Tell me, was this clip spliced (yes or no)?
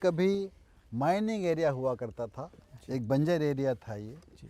no